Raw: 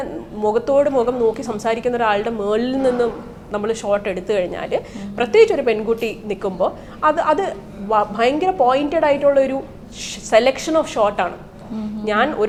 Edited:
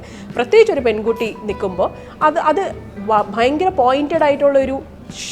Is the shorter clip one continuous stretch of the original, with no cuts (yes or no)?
yes